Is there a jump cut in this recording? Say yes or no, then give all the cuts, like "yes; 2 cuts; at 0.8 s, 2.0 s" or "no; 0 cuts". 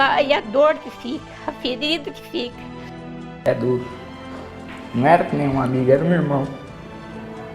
yes; 1 cut; at 3.1 s